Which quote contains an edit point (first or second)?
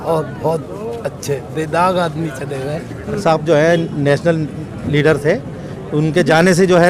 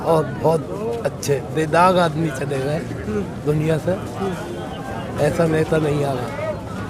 first